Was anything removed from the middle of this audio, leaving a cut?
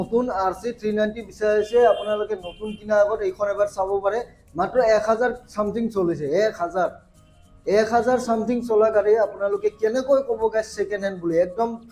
no; 0 cuts

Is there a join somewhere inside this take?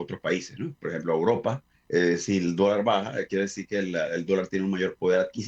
yes; 1 cut; at 1.7 s

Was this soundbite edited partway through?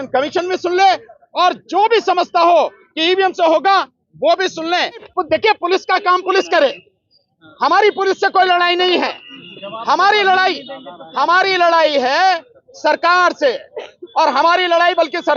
yes; 1 cut; at 5.1 s

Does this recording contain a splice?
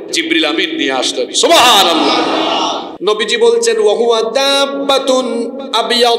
yes; 1 cut; at 2.9 s

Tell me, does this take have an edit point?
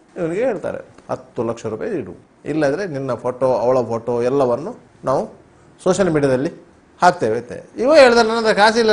no; 0 cuts

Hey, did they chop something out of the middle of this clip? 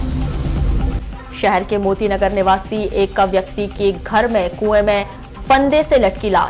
no; 0 cuts

